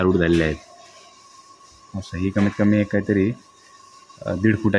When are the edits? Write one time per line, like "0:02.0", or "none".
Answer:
none